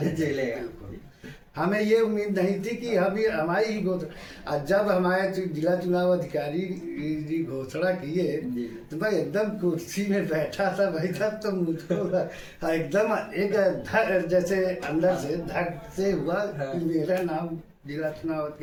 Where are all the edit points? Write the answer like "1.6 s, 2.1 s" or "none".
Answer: none

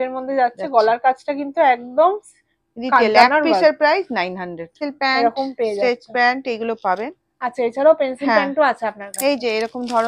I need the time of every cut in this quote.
4.8 s

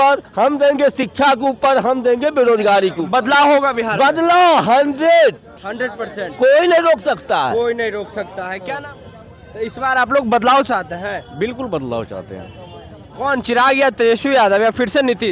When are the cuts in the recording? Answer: 8.8 s

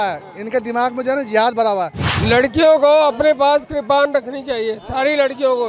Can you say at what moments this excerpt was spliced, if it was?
2.1 s

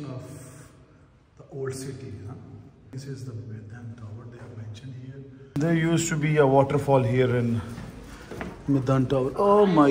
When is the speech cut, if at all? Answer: 2.9 s, 5.6 s

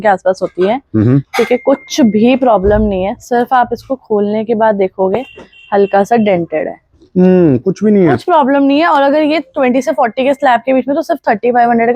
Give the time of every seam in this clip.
none

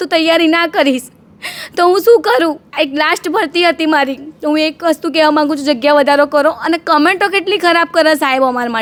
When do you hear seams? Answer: none

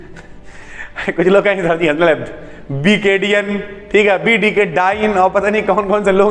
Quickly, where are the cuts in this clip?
none

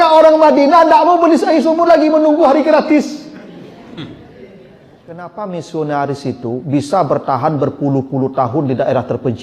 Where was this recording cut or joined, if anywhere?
5.3 s

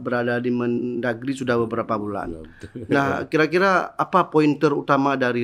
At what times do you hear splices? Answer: none

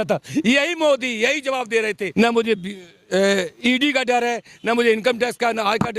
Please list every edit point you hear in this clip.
2.0 s

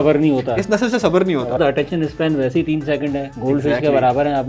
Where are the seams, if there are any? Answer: 1.6 s

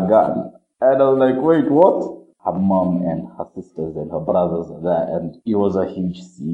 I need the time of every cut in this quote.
2.2 s, 5.3 s

